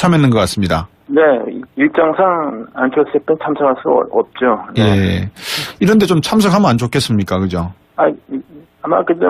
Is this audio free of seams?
no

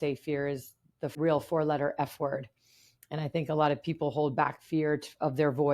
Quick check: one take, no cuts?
no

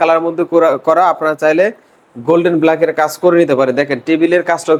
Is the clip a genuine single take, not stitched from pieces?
yes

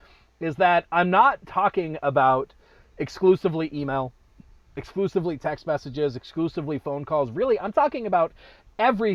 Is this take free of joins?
yes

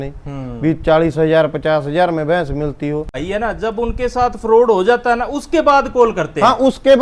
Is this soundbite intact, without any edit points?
no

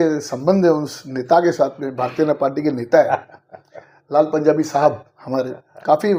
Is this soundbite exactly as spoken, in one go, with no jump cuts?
yes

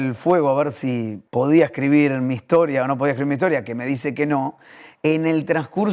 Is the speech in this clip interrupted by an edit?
yes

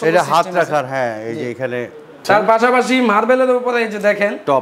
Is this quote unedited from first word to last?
no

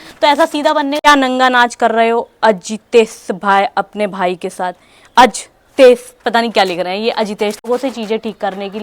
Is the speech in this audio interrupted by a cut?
yes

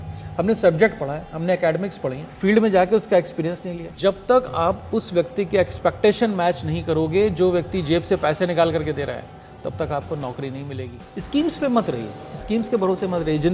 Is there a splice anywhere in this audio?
yes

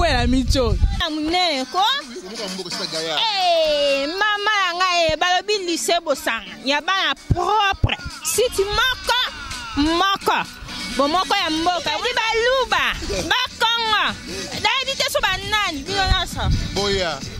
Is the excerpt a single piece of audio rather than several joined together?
no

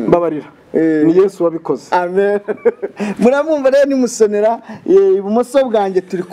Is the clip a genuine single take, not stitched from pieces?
yes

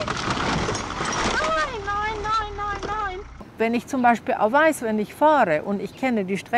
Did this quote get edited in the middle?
yes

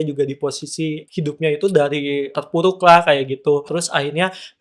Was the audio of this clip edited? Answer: yes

